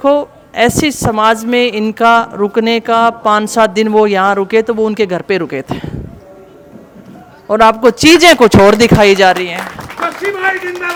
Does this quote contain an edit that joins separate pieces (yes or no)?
no